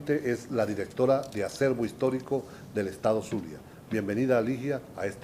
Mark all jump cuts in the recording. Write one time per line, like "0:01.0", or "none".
0:03.0